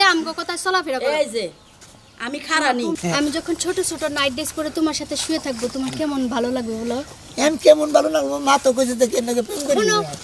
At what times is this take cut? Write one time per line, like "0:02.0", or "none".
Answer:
0:02.9

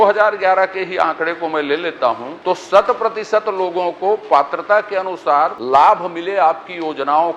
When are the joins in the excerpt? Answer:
0:02.3
0:05.6

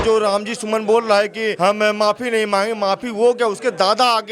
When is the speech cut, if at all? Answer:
0:01.5

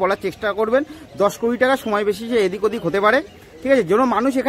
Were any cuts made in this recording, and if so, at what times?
none

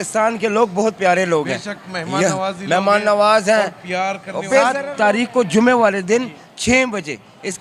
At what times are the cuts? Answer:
0:04.8

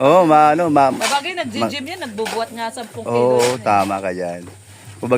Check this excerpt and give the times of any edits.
0:01.0

